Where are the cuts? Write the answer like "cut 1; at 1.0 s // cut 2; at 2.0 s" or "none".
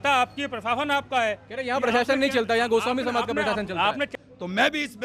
cut 1; at 4.1 s